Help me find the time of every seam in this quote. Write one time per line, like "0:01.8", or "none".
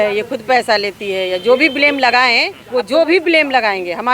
0:02.6